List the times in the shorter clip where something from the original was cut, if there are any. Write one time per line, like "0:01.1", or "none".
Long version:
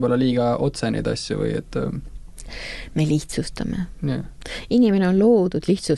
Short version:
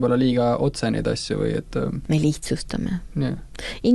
0:02.0